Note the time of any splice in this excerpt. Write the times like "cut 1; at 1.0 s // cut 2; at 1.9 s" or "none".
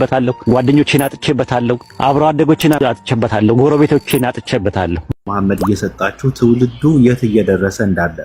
cut 1; at 5.0 s